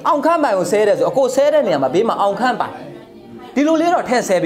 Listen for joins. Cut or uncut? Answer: uncut